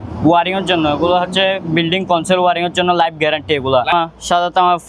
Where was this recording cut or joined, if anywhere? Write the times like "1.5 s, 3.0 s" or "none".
3.9 s